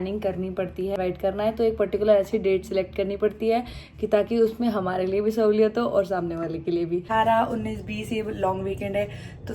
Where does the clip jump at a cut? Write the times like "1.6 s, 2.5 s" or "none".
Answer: 0.9 s, 7.1 s